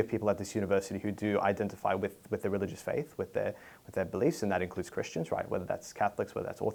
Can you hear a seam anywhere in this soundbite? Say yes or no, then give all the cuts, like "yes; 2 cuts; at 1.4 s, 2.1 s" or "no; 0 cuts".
no; 0 cuts